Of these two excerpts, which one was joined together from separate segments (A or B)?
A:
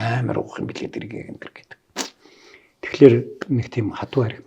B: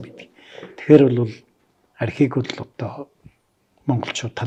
A